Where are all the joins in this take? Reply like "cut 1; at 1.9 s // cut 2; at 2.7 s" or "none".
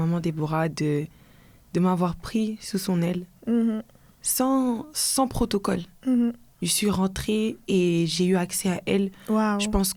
none